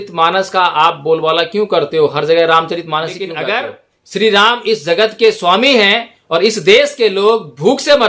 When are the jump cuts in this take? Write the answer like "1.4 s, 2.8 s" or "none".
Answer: 3.4 s

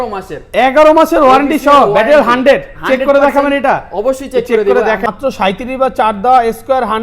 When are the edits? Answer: 5.1 s

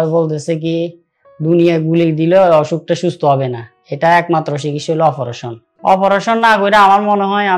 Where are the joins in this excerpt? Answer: 5.6 s

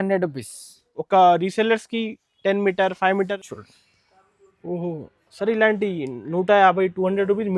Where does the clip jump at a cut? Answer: 3.5 s

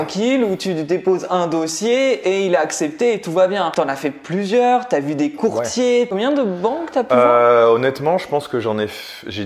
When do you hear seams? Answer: 3.7 s, 6.1 s

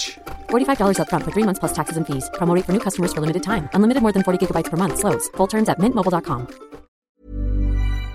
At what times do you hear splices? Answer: 7.2 s

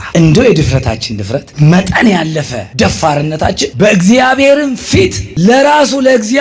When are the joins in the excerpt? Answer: 1.5 s, 2.6 s, 3.7 s, 5.2 s

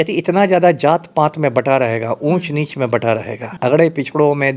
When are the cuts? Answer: 3.5 s

